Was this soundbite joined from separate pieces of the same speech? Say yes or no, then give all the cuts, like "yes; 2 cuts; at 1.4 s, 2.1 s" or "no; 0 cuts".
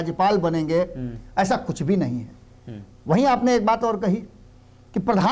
no; 0 cuts